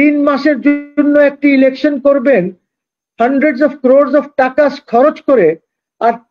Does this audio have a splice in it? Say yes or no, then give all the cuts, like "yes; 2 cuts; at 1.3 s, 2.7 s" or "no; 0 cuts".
no; 0 cuts